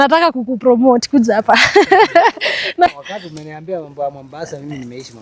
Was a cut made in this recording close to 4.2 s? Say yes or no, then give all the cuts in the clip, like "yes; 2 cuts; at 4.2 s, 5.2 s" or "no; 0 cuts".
no; 1 cut; at 2.9 s